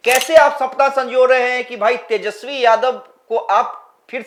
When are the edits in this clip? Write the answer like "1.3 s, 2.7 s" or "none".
none